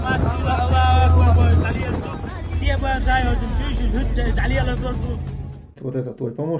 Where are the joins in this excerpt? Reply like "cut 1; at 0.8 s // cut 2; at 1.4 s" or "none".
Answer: cut 1; at 5.7 s